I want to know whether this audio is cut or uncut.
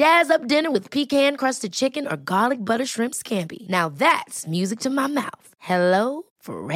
uncut